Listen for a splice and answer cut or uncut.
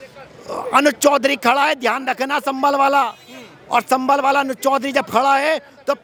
uncut